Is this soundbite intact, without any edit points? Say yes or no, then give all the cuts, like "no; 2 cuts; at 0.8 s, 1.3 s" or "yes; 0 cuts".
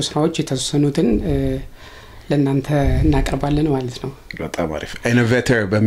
yes; 0 cuts